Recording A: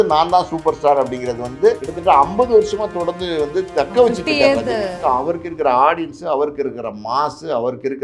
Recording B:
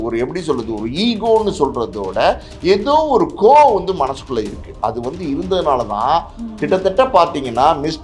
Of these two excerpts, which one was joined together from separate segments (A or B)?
A